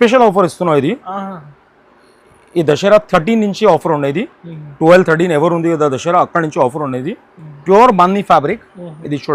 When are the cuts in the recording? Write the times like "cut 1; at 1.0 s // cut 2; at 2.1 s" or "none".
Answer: cut 1; at 7.5 s